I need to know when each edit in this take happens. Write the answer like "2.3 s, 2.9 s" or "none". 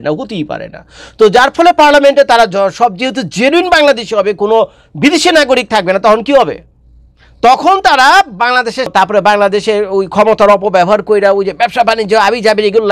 8.9 s